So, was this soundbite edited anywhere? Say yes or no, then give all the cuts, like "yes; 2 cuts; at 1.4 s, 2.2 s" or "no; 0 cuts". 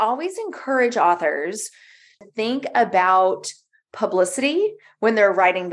yes; 1 cut; at 2.1 s